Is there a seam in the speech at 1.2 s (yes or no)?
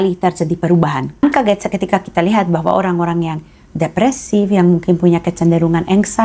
yes